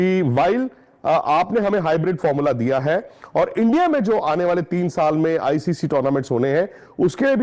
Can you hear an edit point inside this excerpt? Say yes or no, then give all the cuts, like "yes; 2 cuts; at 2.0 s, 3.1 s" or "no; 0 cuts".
no; 0 cuts